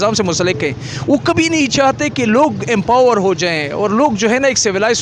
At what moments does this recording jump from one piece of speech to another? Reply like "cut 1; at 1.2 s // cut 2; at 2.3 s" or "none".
none